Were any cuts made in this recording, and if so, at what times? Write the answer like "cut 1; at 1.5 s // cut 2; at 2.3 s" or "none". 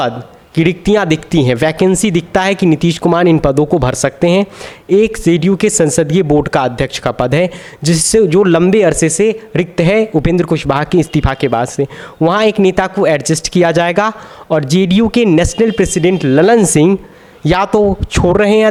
none